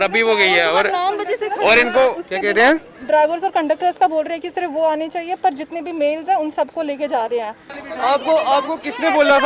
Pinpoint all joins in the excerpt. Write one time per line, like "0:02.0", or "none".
0:07.7